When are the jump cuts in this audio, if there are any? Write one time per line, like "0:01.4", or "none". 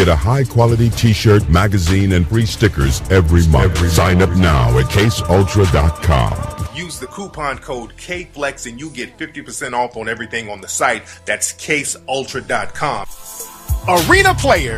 0:08.3